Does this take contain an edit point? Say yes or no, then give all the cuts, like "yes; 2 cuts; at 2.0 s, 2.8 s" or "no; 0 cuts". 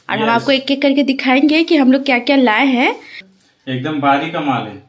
yes; 1 cut; at 3.2 s